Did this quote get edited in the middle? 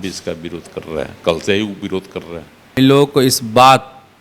yes; 1 cut; at 2.7 s

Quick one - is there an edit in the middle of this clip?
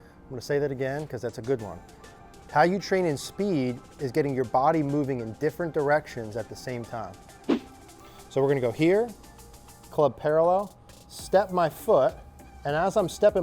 yes; 1 cut; at 7.7 s

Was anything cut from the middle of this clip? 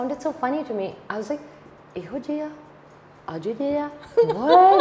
no; 0 cuts

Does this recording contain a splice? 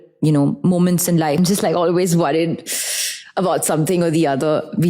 yes; 1 cut; at 1.4 s

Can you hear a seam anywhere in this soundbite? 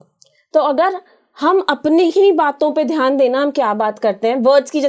no; 0 cuts

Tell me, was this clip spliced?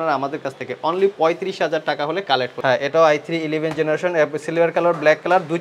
yes; 1 cut; at 2.5 s

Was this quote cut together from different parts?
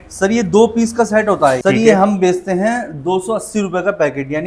yes; 1 cut; at 1.6 s

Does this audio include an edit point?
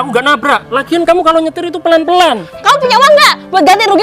yes; 1 cut; at 2.5 s

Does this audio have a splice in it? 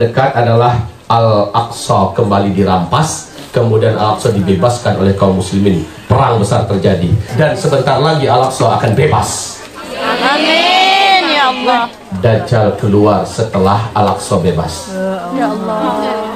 yes; 1 cut; at 7.2 s

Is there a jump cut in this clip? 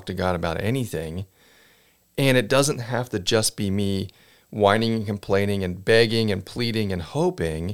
no; 0 cuts

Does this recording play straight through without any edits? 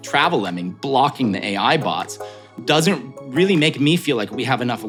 yes; 0 cuts

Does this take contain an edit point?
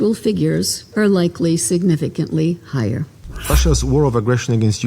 yes; 1 cut; at 3.5 s

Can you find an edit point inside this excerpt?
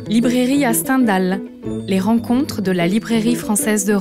yes; 1 cut; at 1.8 s

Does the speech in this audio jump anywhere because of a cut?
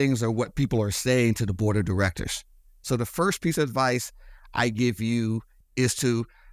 yes; 1 cut; at 5.6 s

